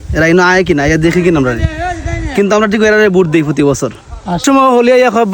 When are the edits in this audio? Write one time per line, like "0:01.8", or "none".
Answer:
0:04.4